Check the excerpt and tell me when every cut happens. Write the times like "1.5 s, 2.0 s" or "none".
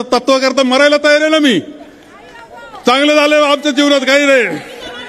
none